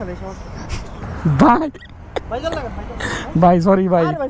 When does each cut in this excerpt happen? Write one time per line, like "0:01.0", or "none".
0:01.0